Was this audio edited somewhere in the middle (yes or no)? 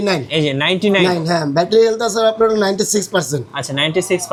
no